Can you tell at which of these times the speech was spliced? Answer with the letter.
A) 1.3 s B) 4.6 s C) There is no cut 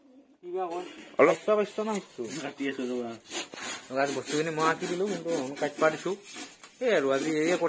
A